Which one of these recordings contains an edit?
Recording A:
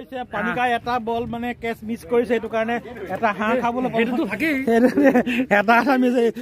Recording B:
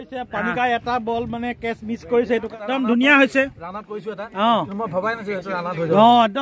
B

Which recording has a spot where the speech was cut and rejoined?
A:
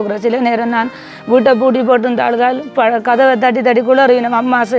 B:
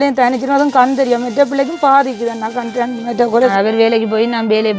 B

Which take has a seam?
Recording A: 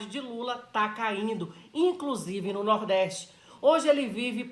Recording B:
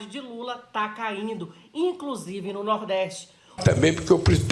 B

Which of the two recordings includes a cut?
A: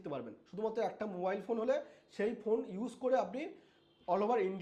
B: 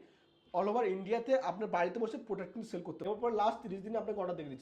B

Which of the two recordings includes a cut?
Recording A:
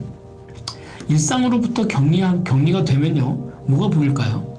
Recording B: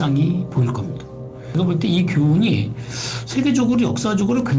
B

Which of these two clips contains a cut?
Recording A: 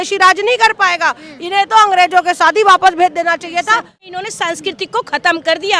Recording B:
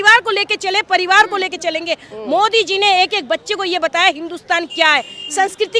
A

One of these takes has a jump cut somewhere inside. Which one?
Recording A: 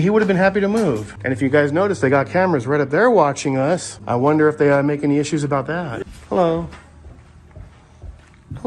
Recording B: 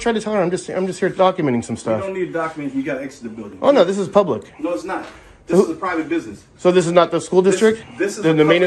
A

